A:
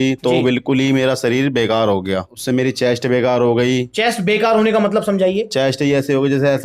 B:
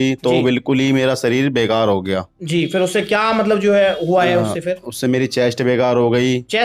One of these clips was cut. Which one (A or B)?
A